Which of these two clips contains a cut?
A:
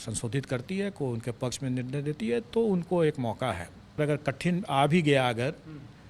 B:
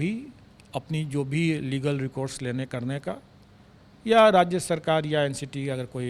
A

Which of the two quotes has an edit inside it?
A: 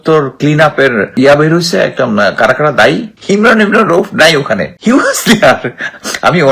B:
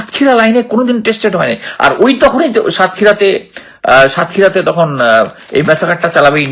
A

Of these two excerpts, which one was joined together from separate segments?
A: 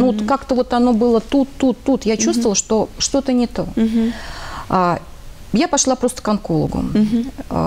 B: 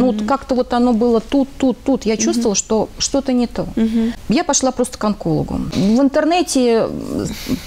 B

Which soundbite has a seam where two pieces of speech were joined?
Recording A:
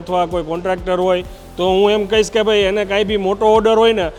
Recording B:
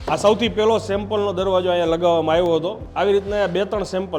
B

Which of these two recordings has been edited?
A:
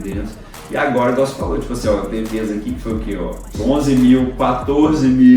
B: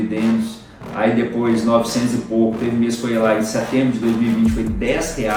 A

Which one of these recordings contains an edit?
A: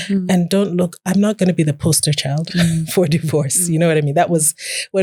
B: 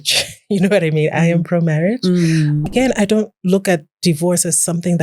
B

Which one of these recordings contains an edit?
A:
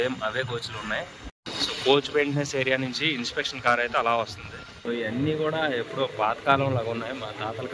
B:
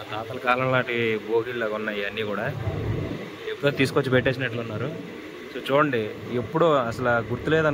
A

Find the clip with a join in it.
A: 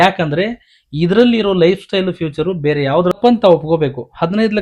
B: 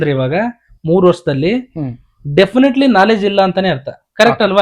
A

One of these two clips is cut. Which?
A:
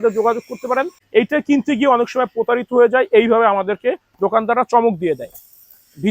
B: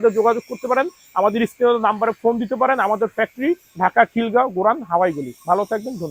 A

